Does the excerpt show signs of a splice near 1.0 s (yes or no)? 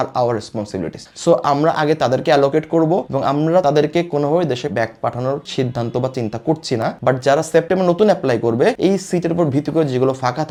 no